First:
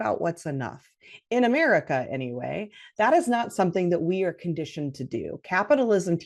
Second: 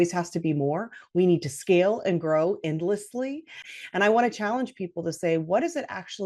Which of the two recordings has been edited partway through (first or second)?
second